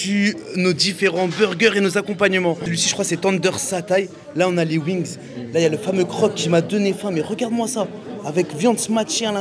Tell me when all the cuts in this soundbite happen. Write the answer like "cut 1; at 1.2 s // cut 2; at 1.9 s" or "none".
none